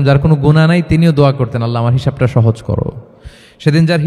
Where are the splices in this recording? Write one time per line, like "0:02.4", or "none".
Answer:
none

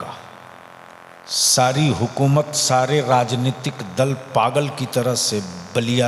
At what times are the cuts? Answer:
0:01.2

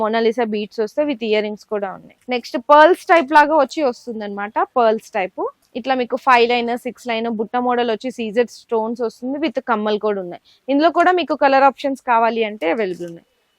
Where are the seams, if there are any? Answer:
none

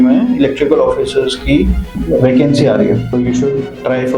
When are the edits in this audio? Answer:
0:01.9
0:03.1

